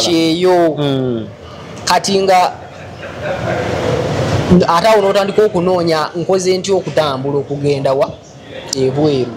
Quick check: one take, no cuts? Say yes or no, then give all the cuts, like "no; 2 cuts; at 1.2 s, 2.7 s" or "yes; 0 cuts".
yes; 0 cuts